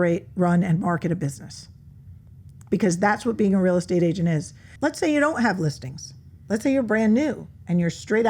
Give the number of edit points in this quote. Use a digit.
1